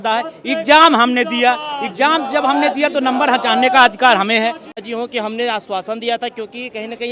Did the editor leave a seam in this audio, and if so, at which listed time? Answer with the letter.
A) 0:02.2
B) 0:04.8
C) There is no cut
B